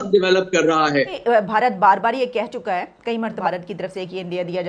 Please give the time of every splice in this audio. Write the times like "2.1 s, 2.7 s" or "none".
1.2 s, 3.4 s